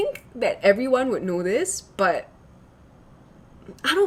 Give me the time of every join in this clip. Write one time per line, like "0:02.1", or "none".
none